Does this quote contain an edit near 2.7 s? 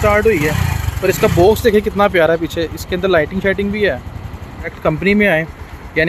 no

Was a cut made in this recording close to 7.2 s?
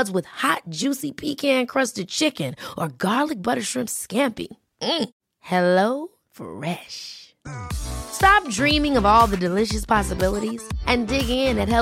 no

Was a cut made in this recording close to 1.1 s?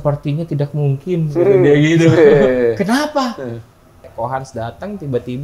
no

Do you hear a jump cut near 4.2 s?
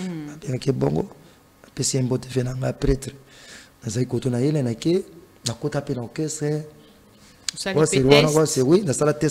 no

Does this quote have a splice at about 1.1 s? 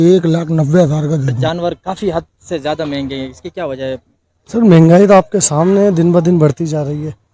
no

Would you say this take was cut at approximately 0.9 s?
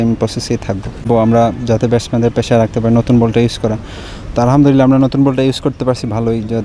yes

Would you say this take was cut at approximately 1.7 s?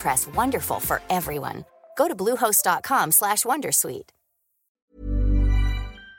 no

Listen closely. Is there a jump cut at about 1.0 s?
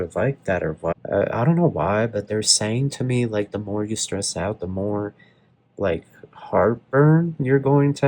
yes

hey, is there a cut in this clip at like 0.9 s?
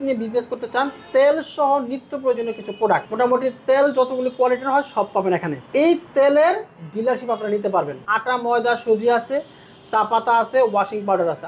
no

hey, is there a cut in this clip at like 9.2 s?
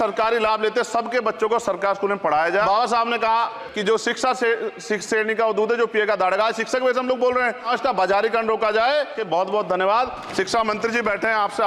yes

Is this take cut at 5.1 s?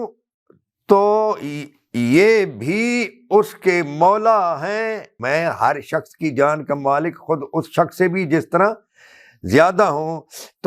yes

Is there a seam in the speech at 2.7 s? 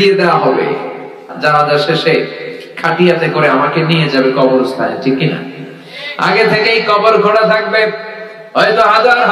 no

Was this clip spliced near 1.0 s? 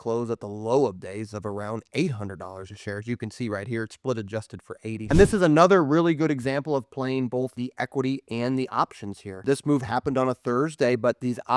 no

